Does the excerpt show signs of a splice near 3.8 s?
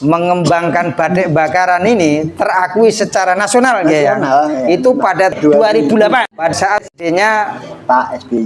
no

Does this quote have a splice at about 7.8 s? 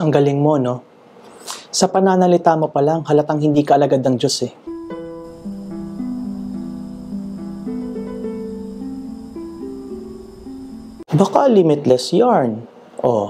no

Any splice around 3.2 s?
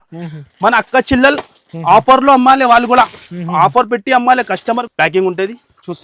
no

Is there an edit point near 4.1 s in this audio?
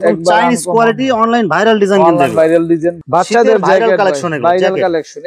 no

